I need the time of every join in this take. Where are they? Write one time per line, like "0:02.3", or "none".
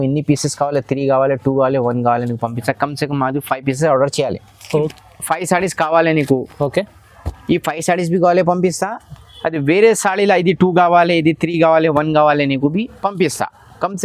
0:04.9